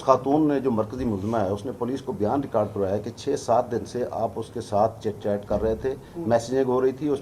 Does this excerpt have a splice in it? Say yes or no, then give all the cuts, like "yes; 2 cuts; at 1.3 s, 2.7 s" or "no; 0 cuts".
no; 0 cuts